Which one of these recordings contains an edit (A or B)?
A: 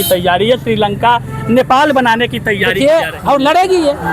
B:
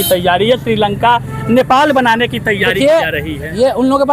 A